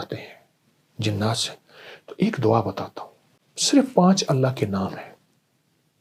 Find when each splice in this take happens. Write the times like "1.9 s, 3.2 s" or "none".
none